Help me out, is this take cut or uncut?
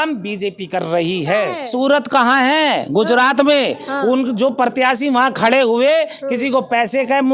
cut